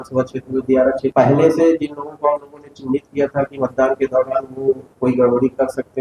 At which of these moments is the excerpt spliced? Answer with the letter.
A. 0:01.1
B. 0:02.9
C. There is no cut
A